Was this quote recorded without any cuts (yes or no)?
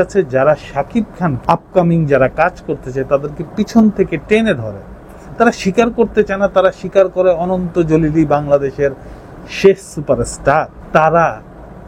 no